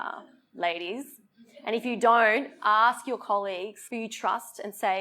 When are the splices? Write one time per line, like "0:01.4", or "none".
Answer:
0:03.8